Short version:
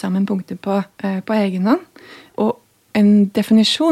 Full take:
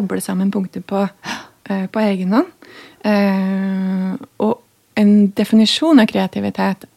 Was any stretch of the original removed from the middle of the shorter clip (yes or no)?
yes